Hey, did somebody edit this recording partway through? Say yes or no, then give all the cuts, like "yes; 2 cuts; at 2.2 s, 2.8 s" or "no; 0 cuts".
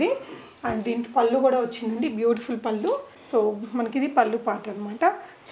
yes; 1 cut; at 3.1 s